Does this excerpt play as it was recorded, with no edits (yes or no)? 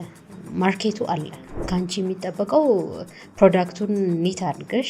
no